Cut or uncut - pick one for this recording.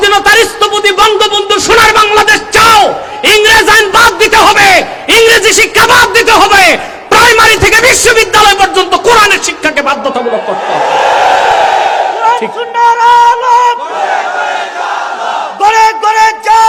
uncut